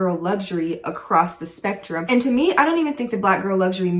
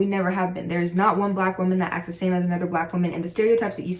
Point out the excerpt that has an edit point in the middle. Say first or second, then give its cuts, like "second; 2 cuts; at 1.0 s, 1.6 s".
first; 1 cut; at 2.0 s